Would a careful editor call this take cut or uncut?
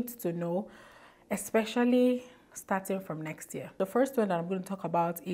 uncut